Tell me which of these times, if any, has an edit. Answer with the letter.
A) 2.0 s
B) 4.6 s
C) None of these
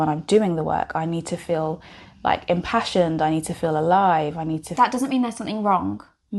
B